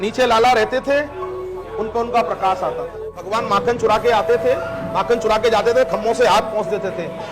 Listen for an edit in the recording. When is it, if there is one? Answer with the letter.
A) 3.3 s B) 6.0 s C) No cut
A